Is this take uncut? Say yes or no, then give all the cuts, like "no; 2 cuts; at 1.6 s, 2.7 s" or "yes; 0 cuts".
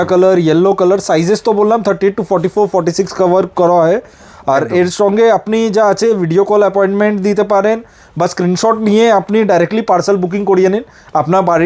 yes; 0 cuts